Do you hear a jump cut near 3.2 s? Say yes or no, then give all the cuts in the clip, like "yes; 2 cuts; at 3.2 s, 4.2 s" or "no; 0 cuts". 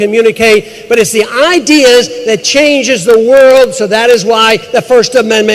yes; 1 cut; at 3.2 s